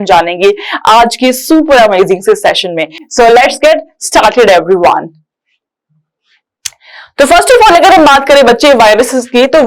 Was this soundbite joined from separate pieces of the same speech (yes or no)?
no